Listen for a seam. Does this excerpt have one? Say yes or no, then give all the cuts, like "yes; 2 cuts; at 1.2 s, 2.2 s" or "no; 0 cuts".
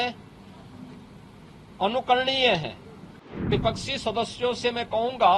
yes; 1 cut; at 3.5 s